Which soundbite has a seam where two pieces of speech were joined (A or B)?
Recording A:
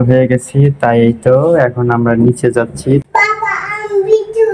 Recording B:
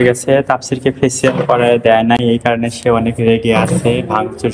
A